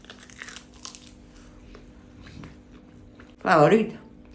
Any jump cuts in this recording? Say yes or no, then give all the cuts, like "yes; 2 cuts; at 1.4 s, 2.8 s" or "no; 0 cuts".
yes; 1 cut; at 3.4 s